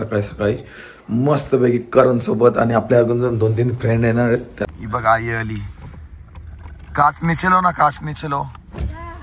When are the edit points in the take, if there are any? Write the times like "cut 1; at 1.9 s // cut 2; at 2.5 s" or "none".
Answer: cut 1; at 4.7 s